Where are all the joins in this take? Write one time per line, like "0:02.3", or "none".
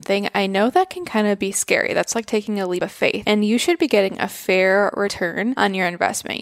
0:03.0
0:05.4